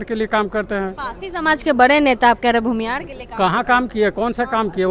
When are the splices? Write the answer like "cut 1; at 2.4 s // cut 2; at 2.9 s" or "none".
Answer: none